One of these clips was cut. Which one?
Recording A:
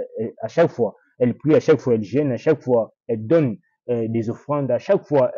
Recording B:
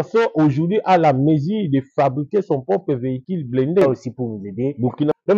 B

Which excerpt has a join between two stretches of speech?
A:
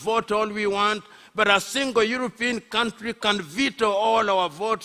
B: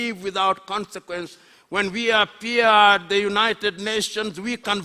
B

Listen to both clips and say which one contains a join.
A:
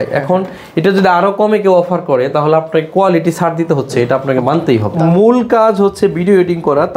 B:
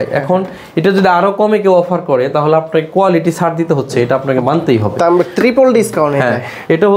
A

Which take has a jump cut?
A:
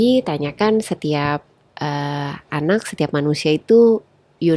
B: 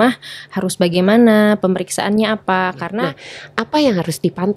B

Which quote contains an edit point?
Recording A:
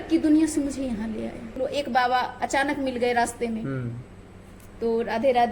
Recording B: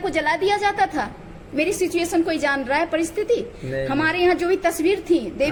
A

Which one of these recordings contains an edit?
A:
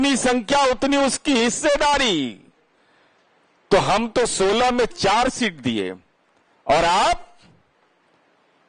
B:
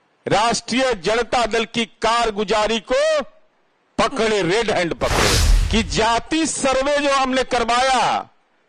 B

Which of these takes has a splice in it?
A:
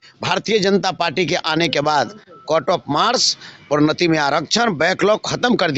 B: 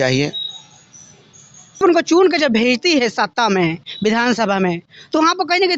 B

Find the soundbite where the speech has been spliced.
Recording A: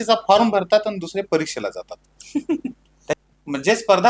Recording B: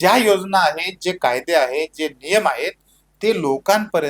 A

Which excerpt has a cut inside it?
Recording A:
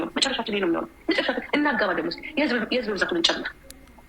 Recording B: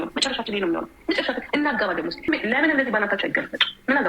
B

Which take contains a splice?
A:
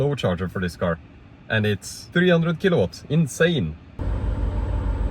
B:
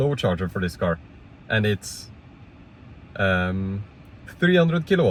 A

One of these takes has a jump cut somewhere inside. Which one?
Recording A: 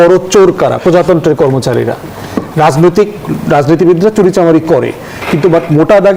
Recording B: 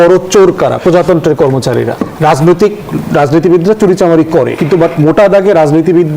B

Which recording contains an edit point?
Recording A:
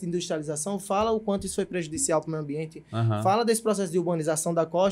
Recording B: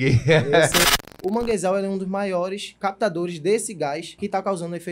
B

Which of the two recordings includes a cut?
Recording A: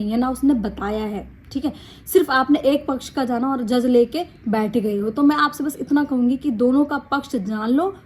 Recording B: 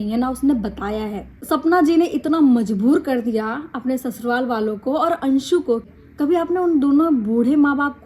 B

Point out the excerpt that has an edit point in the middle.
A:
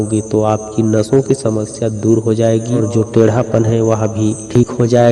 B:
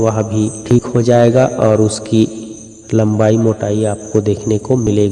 A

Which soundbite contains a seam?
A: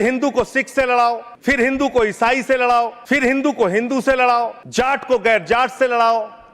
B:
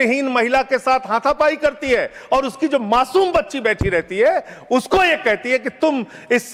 A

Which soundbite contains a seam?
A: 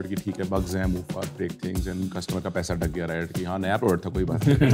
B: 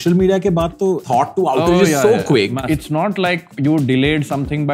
B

